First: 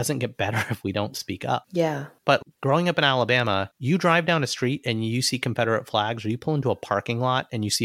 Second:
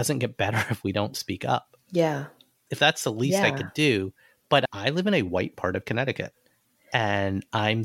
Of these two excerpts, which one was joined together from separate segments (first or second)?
first